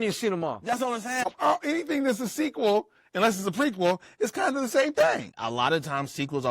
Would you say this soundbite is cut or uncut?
cut